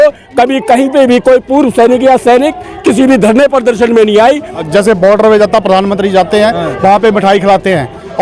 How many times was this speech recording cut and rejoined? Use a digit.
1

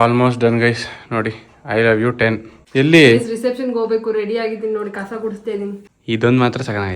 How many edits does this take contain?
2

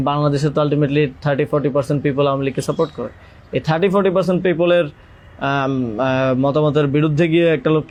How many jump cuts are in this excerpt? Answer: 0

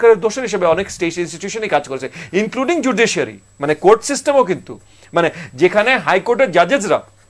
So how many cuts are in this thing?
0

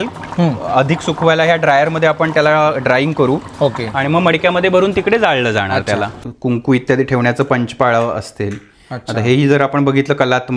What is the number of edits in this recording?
1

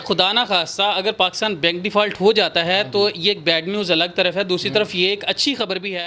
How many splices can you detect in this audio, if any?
0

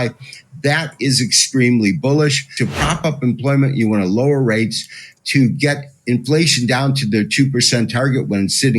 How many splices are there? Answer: 1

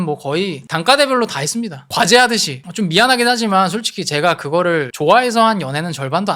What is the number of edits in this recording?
2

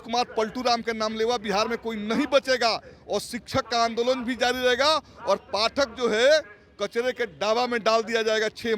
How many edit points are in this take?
0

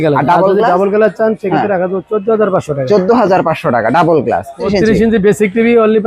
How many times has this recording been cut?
1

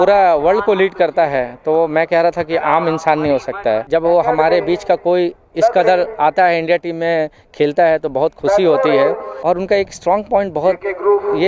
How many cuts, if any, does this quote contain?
2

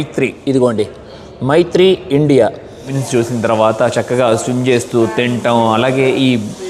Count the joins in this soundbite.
1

